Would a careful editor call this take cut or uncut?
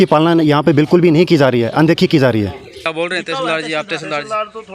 cut